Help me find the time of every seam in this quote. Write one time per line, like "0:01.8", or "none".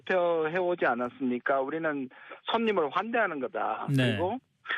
0:02.2